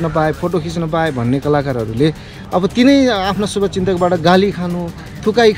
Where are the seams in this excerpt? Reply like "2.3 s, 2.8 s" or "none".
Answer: 2.4 s